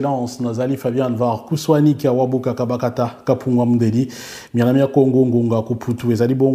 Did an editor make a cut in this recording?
no; 0 cuts

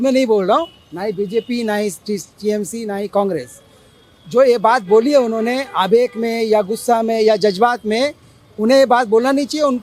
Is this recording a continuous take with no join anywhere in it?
yes; 0 cuts

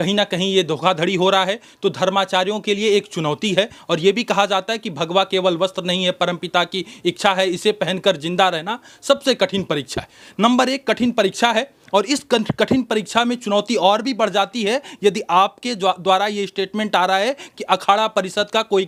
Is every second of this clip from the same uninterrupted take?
yes; 0 cuts

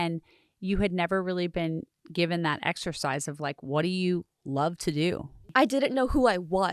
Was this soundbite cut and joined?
yes; 2 cuts; at 2.0 s, 5.3 s

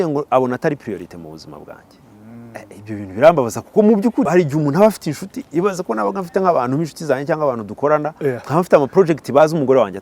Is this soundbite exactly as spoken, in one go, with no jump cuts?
no; 1 cut; at 4.3 s

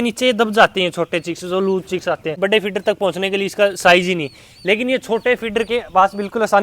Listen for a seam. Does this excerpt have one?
yes; 1 cut; at 2.4 s

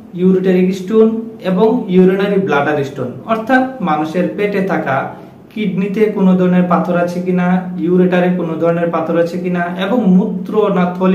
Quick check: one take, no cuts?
yes; 0 cuts

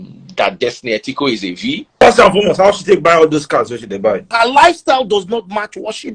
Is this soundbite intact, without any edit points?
no; 2 cuts; at 2.0 s, 4.3 s

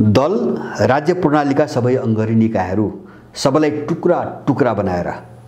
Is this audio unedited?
yes; 0 cuts

